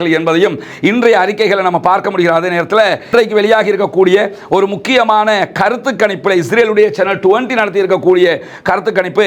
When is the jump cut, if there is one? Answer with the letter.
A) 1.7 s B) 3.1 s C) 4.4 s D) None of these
B